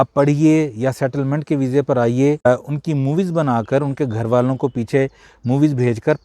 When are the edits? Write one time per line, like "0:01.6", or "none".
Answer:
0:02.5